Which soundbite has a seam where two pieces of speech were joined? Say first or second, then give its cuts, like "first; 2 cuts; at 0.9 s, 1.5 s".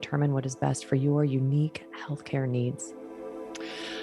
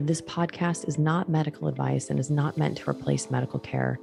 first; 1 cut; at 2.9 s